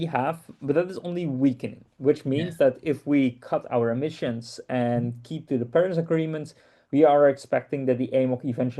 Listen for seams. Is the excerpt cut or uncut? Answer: uncut